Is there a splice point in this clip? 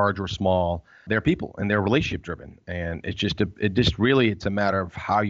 yes; 1 cut; at 1.0 s

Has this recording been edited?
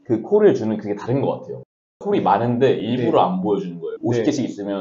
yes; 2 cuts; at 2.0 s, 3.9 s

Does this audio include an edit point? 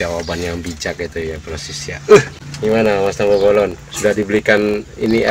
yes; 1 cut; at 2.4 s

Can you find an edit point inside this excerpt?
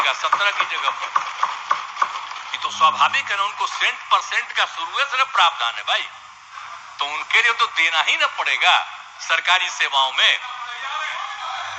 no; 0 cuts

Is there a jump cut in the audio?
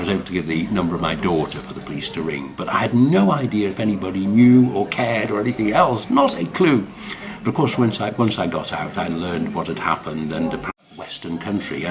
no; 0 cuts

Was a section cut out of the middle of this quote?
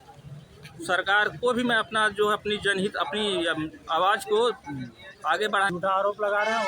yes; 1 cut; at 5.7 s

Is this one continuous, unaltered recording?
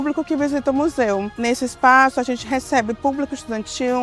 no; 1 cut; at 1.4 s

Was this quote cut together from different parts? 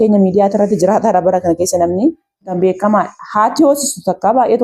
yes; 1 cut; at 2.5 s

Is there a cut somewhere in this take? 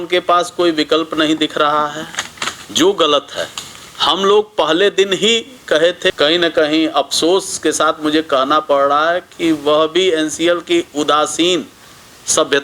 yes; 1 cut; at 6.1 s

